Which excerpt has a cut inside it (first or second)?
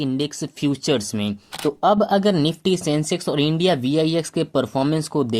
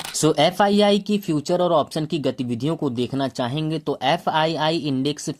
first